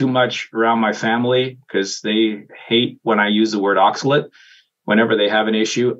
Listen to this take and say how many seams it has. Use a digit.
0